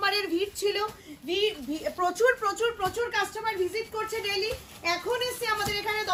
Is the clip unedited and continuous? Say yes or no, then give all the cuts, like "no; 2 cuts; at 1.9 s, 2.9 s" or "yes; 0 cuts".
yes; 0 cuts